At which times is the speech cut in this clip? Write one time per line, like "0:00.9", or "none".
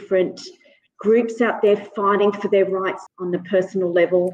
0:03.0

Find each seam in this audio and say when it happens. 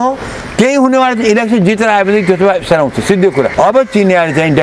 0:03.5

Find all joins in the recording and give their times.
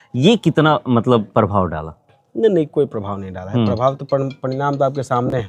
none

